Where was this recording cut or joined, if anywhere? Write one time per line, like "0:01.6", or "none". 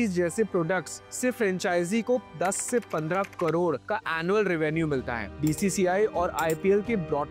none